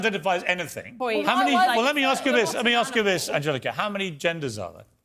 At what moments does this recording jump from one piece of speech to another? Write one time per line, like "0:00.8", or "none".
0:00.9